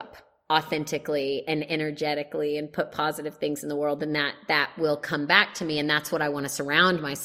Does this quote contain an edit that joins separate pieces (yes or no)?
no